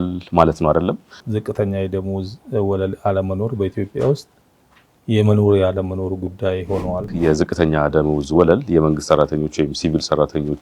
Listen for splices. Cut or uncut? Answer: cut